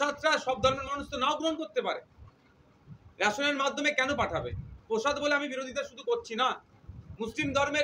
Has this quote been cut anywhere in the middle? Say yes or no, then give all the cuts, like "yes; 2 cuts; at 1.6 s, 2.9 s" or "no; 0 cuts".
no; 0 cuts